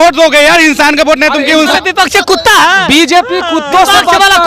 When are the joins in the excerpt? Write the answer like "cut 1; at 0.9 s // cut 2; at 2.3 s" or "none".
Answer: cut 1; at 1.7 s